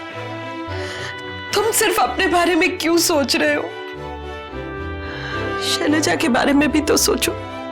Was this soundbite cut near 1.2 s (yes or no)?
no